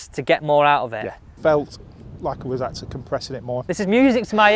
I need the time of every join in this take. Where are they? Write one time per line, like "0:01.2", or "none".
0:01.3
0:03.6